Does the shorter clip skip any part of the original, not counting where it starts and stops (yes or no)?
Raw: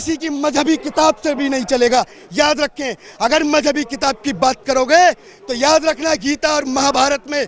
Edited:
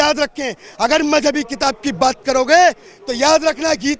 no